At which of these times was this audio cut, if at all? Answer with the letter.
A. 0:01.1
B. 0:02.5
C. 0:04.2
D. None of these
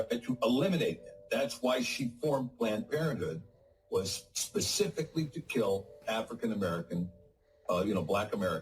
B